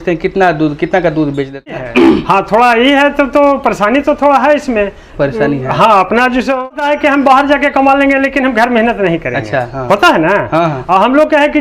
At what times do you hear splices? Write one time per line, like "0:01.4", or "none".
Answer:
0:01.8
0:06.7